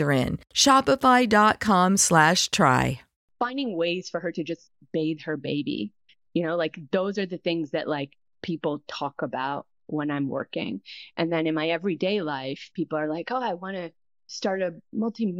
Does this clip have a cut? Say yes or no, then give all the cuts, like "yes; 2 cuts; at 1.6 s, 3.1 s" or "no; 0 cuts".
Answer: yes; 1 cut; at 3.2 s